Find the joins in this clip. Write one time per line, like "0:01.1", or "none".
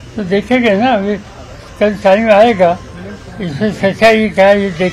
none